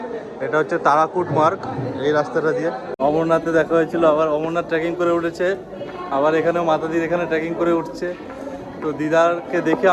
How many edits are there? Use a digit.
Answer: 1